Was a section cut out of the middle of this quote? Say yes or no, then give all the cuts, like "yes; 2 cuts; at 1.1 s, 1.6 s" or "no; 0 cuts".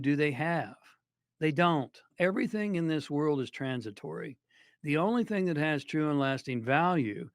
yes; 1 cut; at 2.1 s